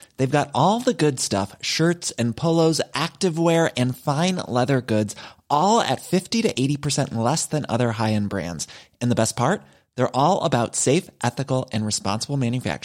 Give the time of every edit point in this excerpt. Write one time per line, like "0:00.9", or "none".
none